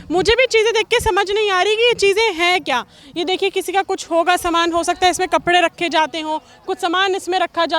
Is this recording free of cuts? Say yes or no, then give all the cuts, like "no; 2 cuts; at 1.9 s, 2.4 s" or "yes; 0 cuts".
yes; 0 cuts